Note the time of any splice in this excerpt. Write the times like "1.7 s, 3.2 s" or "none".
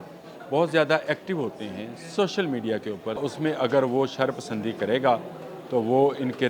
3.2 s